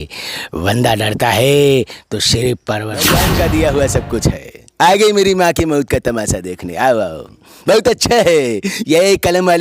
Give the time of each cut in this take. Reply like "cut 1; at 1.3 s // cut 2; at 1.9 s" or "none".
cut 1; at 3.2 s